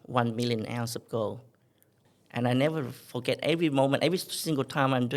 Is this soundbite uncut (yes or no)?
no